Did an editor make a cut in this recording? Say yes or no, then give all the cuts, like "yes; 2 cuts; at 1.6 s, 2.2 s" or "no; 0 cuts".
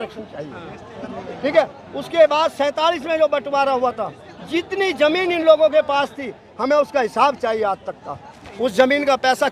no; 0 cuts